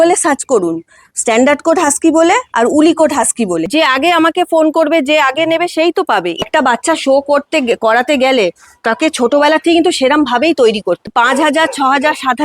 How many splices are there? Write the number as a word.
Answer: three